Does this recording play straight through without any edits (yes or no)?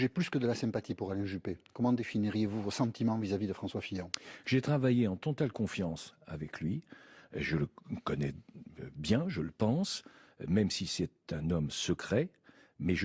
no